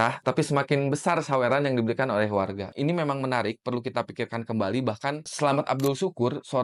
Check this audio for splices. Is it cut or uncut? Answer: uncut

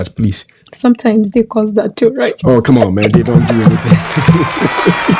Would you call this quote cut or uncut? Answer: uncut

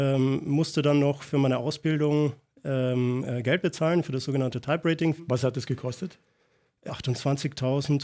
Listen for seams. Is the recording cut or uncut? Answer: cut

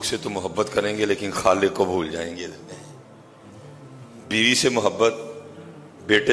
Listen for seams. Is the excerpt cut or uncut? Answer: uncut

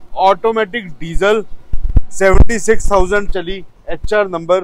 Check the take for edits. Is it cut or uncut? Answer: uncut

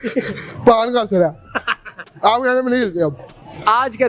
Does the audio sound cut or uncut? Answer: uncut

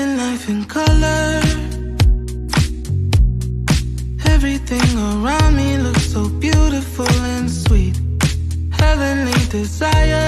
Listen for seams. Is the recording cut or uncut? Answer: uncut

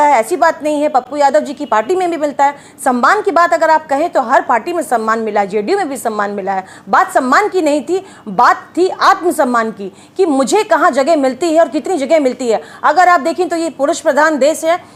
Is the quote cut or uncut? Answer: uncut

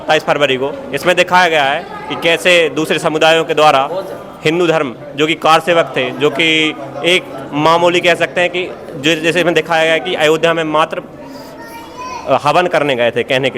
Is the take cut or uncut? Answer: uncut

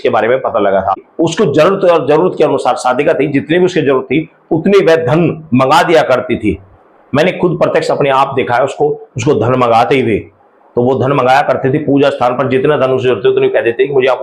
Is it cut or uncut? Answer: cut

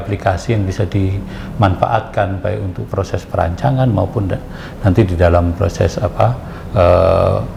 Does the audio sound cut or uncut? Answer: uncut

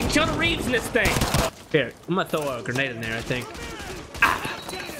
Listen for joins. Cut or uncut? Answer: cut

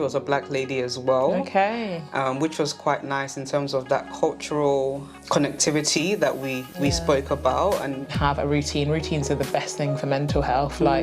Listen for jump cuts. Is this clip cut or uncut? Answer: cut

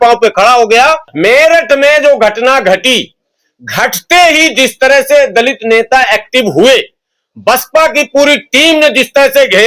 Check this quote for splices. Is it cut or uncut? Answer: cut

